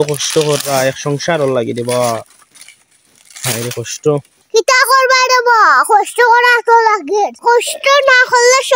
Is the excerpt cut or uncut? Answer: cut